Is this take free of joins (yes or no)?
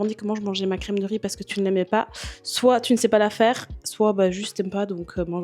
yes